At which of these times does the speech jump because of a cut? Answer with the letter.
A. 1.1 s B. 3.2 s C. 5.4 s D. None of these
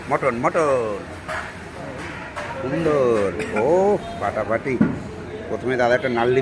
D